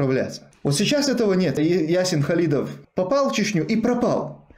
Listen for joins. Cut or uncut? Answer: cut